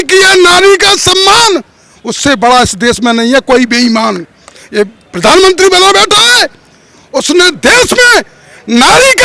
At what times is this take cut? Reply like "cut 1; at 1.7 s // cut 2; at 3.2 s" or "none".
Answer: none